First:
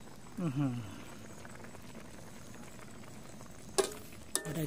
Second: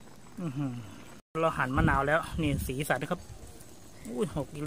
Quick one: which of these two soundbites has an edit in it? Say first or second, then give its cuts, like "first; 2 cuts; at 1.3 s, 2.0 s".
second; 1 cut; at 1.1 s